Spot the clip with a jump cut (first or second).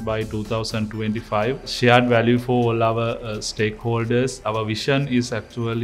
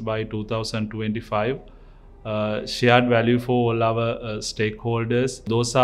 first